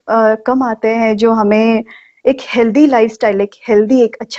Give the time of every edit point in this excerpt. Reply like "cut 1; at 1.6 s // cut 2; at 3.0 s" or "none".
none